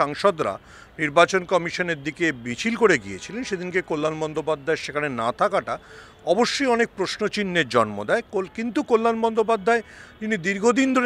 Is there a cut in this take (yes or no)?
no